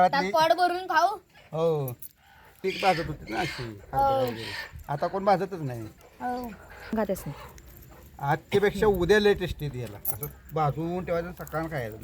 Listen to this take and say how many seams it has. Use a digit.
1